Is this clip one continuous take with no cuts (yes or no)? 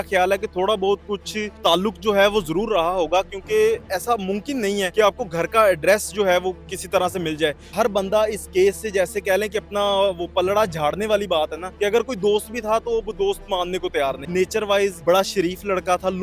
no